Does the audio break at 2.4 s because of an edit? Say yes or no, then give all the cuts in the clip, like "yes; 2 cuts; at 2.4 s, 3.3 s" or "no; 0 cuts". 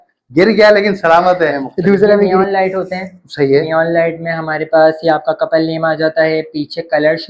yes; 1 cut; at 2.4 s